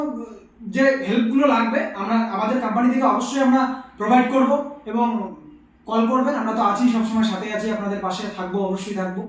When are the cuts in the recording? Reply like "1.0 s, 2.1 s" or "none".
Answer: none